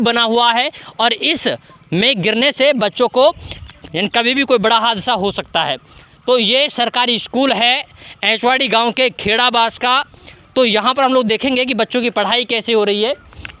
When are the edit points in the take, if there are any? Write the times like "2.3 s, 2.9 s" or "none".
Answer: none